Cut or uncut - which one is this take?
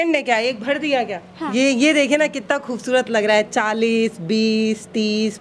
cut